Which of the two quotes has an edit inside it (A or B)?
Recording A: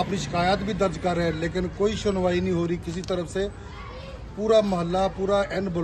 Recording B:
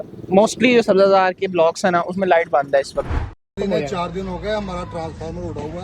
B